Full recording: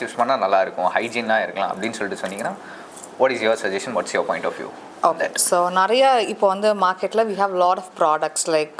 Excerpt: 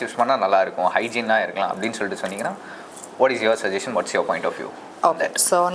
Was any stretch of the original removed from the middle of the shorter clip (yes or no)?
no